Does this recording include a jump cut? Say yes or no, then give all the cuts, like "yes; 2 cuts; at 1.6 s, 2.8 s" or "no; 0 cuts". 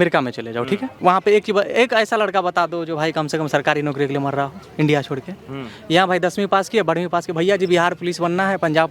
yes; 1 cut; at 0.9 s